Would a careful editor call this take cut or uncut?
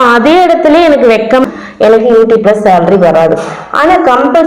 cut